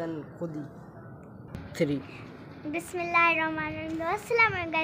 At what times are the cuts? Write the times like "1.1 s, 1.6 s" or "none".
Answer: 1.4 s